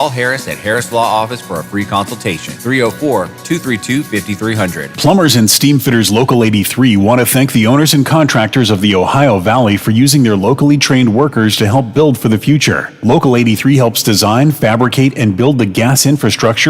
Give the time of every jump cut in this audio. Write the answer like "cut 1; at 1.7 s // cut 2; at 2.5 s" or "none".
cut 1; at 4.9 s